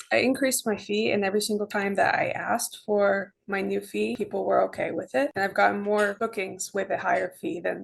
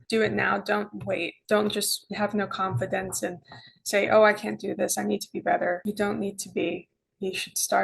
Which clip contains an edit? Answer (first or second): first